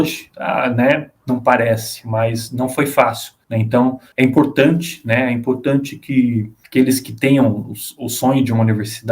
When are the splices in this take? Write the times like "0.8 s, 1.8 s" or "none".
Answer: 6.6 s